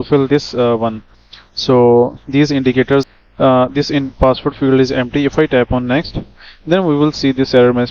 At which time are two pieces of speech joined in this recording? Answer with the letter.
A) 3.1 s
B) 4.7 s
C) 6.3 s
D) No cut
A